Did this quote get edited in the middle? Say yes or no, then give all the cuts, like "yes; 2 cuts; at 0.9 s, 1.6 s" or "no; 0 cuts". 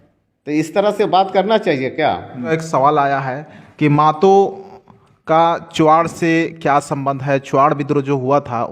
yes; 1 cut; at 2.5 s